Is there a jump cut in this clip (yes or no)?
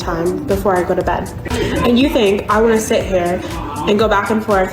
yes